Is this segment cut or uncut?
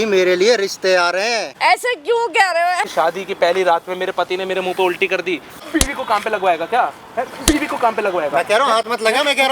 cut